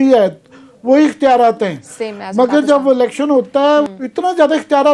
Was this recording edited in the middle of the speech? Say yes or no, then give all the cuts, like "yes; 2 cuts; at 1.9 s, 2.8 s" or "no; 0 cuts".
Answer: yes; 1 cut; at 3.9 s